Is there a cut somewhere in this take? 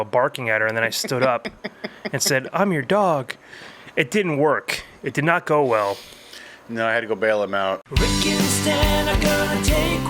yes; 1 cut; at 7.9 s

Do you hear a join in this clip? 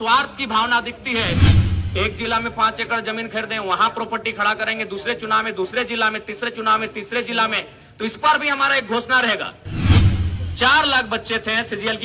yes; 2 cuts; at 1.5 s, 10.0 s

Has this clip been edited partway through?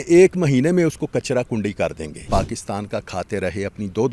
yes; 1 cut; at 2.2 s

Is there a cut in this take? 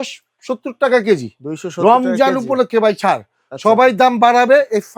no; 0 cuts

